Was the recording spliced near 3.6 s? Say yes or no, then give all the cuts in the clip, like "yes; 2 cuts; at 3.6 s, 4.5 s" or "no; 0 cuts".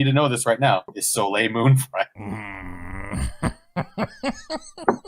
no; 2 cuts; at 1.0 s, 2.2 s